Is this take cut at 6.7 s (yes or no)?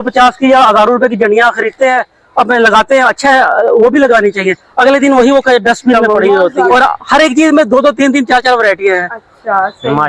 yes